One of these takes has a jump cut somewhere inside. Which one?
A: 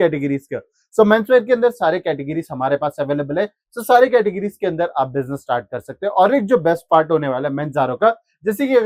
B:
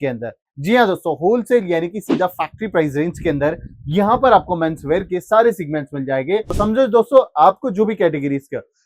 B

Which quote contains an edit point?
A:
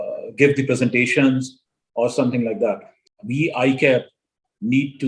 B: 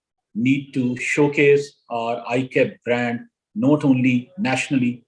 A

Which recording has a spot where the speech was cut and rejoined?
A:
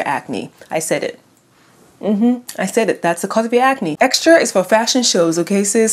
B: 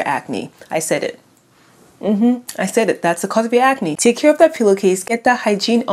A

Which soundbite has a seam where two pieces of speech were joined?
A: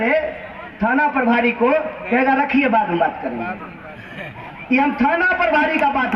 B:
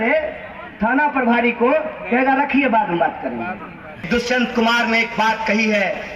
B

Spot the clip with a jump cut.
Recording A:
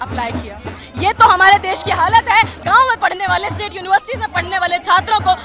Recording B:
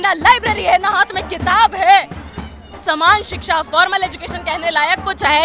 A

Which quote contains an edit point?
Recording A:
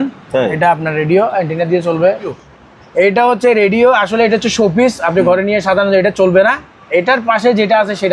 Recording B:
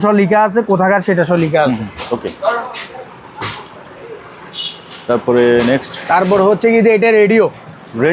A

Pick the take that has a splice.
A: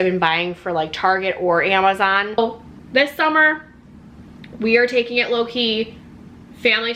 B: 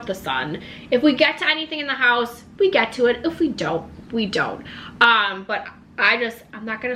A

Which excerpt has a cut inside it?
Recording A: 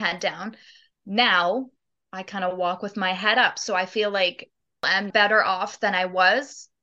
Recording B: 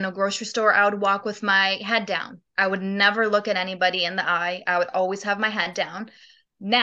A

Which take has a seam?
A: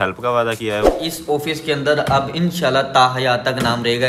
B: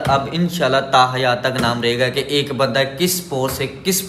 A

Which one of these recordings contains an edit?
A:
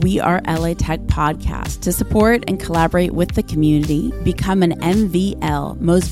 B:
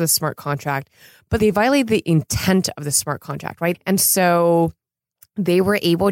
B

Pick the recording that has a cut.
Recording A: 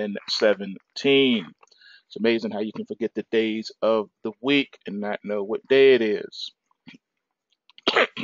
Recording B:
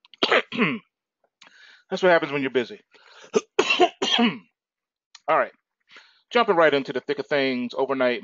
B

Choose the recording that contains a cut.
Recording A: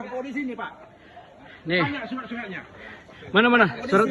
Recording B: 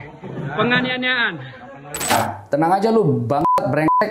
B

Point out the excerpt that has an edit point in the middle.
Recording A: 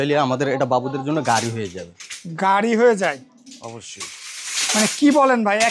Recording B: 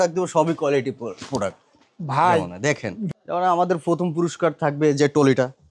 B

